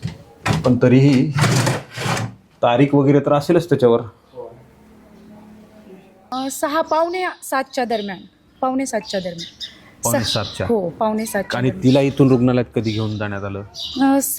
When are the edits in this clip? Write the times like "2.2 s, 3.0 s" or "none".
6.4 s